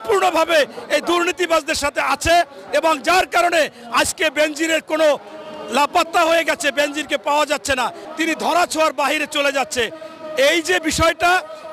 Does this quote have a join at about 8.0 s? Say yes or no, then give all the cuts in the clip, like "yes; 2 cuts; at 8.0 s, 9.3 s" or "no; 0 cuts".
yes; 1 cut; at 8.0 s